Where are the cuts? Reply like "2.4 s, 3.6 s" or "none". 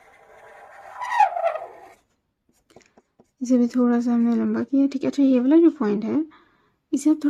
none